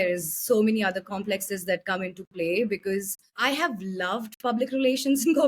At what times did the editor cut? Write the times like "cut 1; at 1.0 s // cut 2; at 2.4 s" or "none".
cut 1; at 3.2 s

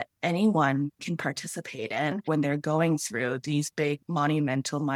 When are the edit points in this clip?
cut 1; at 2.2 s // cut 2; at 4.0 s

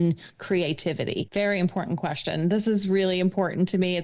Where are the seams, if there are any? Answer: cut 1; at 1.3 s

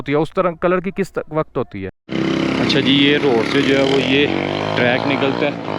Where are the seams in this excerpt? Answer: cut 1; at 2.0 s

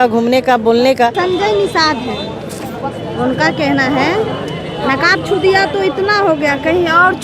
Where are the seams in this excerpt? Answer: cut 1; at 1.2 s

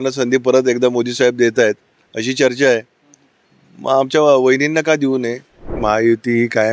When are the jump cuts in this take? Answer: cut 1; at 5.7 s

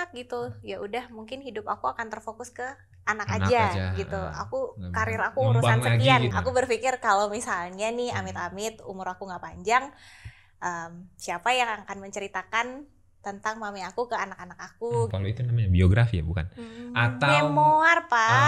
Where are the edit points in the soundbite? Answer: cut 1; at 6.3 s // cut 2; at 15.1 s

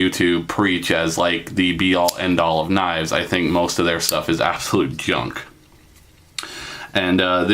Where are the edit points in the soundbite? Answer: cut 1; at 4.2 s

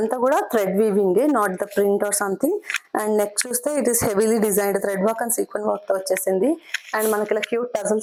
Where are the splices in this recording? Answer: none

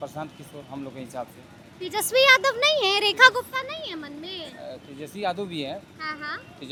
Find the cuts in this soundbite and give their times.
none

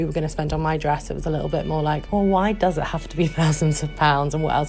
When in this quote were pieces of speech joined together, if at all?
none

